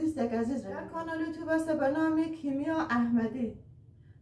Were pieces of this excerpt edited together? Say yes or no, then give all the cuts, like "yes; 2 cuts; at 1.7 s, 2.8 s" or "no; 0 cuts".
yes; 1 cut; at 1.0 s